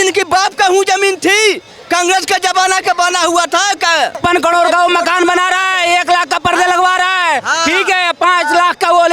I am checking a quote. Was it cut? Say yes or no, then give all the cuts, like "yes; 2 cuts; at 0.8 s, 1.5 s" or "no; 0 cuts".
yes; 1 cut; at 4.2 s